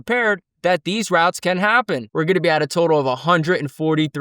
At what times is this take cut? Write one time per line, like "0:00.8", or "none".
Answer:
0:02.1